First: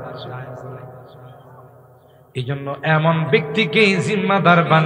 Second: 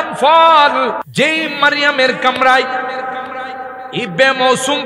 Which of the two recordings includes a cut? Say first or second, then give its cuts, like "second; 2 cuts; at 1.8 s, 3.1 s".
second; 1 cut; at 1.0 s